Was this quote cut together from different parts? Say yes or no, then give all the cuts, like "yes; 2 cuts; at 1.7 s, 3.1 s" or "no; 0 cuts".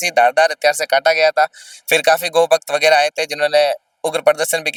no; 0 cuts